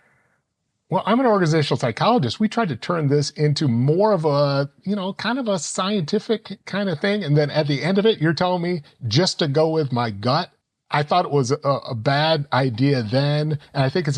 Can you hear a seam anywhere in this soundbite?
yes; 1 cut; at 10.6 s

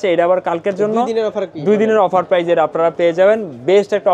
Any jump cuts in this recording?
no; 0 cuts

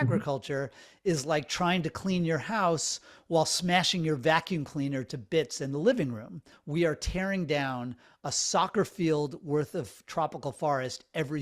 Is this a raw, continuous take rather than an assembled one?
no; 1 cut; at 6.5 s

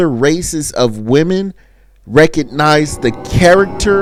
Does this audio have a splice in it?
no; 0 cuts

